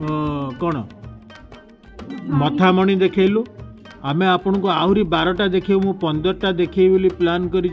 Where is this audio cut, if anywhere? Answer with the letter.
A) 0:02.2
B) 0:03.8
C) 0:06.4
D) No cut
D